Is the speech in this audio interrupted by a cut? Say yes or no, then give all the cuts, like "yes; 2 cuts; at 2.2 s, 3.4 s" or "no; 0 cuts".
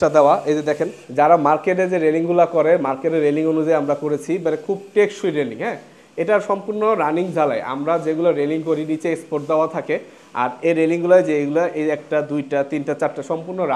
yes; 1 cut; at 1.0 s